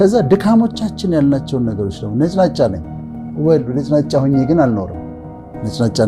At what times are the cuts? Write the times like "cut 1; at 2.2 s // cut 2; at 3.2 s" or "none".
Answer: none